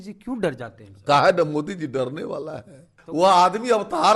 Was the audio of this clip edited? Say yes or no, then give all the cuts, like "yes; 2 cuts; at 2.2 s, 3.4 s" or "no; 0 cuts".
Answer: yes; 1 cut; at 2.9 s